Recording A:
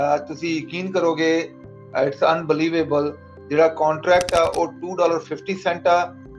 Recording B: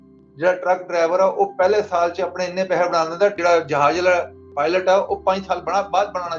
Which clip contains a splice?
B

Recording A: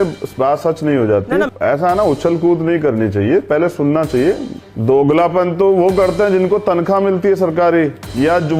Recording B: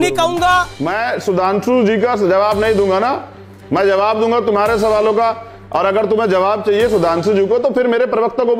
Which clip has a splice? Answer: A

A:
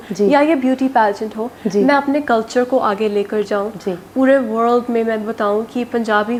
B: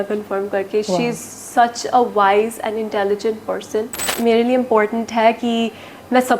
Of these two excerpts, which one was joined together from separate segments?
B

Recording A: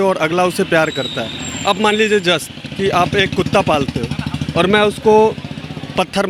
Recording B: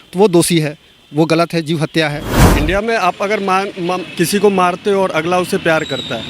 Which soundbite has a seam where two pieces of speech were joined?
B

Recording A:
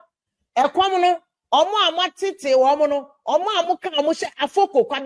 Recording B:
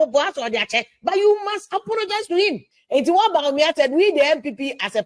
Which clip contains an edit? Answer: B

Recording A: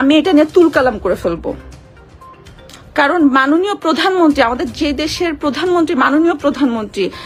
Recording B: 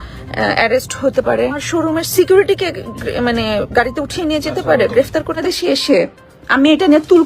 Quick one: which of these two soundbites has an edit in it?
B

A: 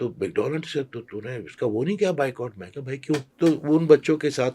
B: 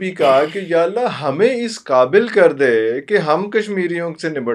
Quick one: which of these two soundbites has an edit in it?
A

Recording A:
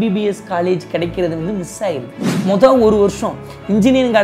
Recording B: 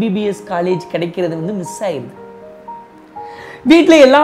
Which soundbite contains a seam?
A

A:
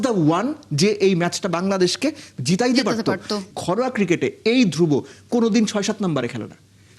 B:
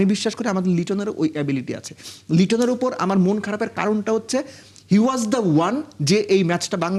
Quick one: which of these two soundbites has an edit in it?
A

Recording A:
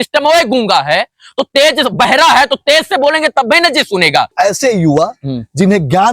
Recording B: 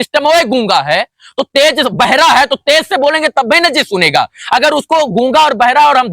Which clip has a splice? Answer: A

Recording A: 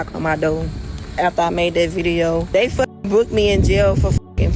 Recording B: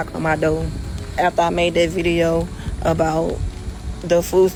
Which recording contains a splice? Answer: A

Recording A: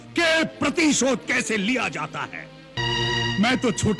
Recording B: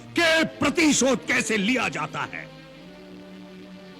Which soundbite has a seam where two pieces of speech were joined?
A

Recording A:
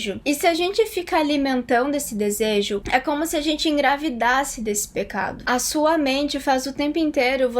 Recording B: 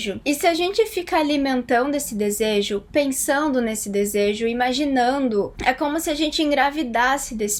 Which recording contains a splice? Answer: A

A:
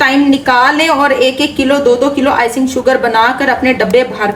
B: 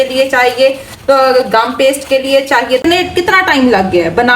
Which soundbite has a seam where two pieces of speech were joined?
B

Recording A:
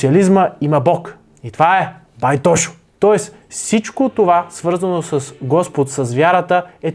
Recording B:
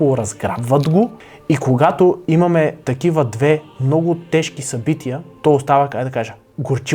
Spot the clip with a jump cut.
B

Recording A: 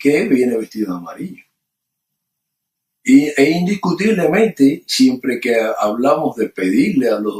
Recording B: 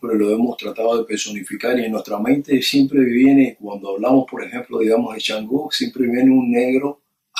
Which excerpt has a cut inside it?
A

